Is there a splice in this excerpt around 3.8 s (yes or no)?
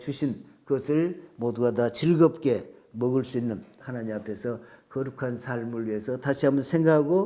yes